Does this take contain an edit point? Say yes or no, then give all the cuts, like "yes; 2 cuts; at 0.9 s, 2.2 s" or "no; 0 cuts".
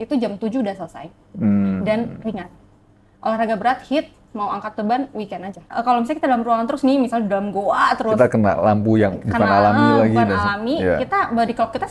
yes; 1 cut; at 5.7 s